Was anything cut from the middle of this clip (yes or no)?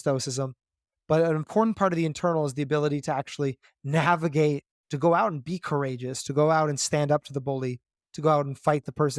no